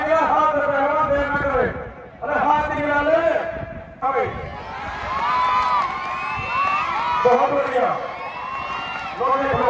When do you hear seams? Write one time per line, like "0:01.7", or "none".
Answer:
0:04.0

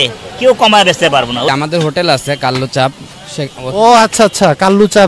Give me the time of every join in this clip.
0:01.5

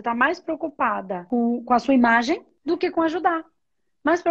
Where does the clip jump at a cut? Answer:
0:01.2
0:02.5

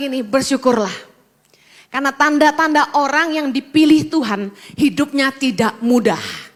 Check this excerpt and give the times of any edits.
none

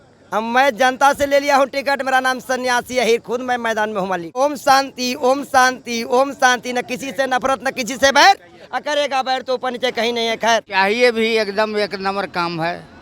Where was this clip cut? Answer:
0:04.4
0:10.7

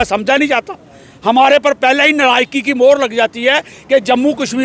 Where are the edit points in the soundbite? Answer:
none

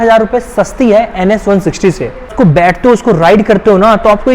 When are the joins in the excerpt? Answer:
0:02.1

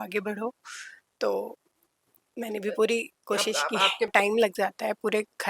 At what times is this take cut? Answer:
0:04.1

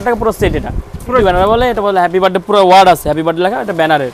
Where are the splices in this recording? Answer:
0:01.2

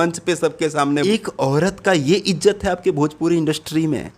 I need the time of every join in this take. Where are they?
0:01.0

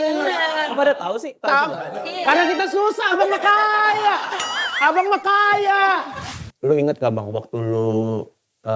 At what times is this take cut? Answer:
0:06.3

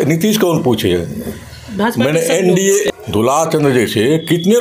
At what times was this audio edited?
0:02.9

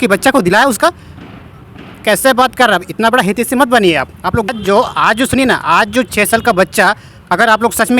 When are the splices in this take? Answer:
0:04.5

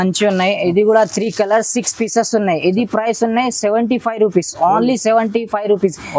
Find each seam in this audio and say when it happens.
none

